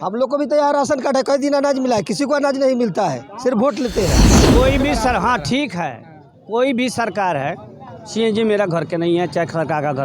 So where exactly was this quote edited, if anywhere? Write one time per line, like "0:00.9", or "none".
0:04.5